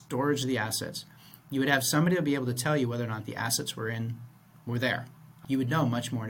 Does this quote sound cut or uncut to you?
cut